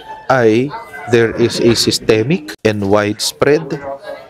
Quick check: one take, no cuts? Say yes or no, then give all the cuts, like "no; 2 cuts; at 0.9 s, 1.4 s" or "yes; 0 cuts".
no; 1 cut; at 2.5 s